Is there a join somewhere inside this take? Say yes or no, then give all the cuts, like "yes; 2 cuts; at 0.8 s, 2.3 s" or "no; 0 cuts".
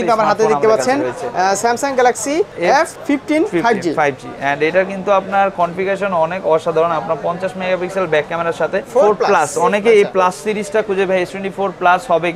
yes; 2 cuts; at 2.7 s, 8.9 s